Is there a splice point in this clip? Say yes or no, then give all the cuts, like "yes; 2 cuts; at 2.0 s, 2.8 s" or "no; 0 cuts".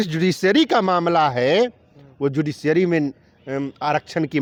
no; 0 cuts